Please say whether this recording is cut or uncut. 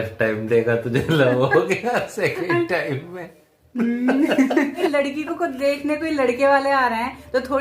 cut